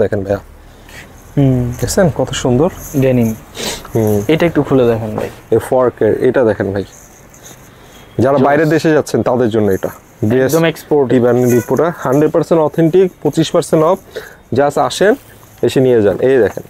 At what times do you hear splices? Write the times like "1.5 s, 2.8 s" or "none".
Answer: none